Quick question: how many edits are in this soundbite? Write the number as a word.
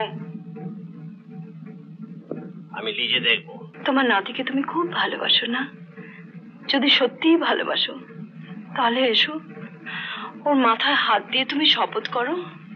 one